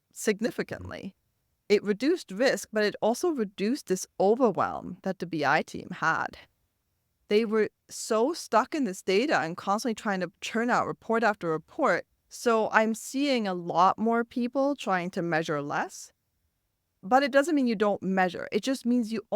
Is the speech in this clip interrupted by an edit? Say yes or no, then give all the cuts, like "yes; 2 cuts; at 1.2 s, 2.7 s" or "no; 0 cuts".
yes; 1 cut; at 12.2 s